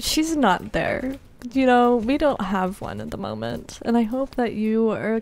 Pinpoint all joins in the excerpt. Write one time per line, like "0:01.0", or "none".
none